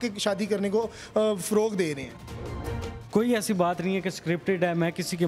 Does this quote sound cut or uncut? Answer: cut